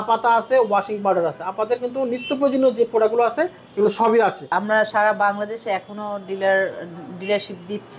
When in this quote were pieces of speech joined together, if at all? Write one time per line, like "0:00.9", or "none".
0:04.4